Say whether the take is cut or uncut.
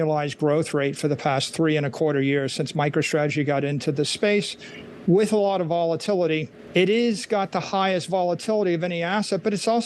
cut